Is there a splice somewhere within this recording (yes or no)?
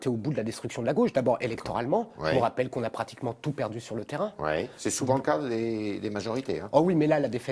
no